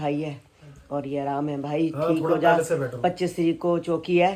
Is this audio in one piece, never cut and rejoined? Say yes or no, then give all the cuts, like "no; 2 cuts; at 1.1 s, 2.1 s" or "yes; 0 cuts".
yes; 0 cuts